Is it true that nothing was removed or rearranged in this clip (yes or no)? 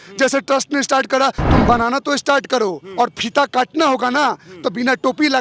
no